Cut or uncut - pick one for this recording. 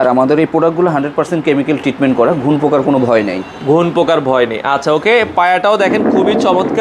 uncut